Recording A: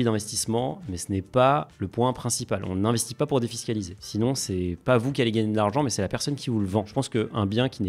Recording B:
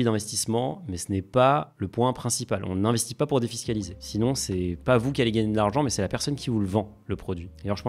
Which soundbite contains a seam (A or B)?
A